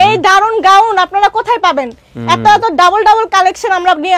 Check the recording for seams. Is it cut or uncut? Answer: uncut